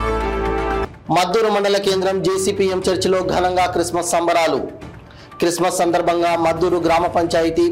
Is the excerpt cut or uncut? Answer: cut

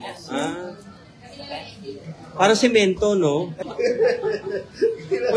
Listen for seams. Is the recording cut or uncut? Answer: cut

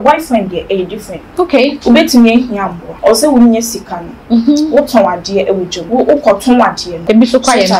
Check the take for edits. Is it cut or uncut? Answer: cut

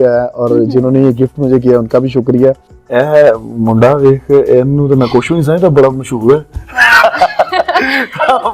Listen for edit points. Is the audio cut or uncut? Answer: cut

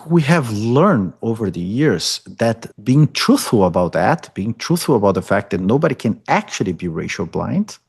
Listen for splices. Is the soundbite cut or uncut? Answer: cut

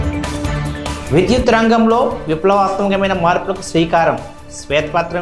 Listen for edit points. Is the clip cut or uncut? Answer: cut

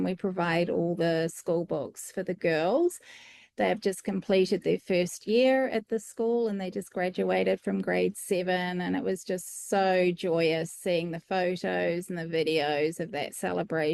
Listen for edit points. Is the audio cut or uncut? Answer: uncut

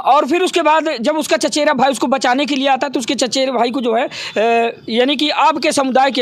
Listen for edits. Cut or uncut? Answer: uncut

